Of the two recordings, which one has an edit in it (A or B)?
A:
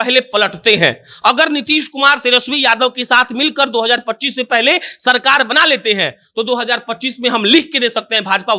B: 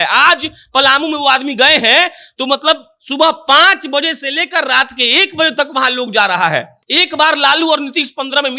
B